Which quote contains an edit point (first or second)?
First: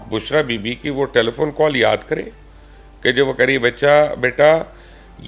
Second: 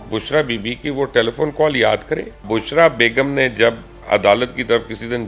second